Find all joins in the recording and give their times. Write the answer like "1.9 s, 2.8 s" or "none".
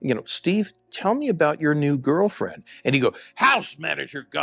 none